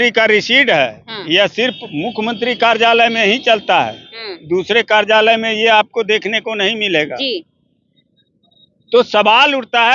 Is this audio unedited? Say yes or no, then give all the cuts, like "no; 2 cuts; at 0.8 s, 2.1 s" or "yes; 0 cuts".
yes; 0 cuts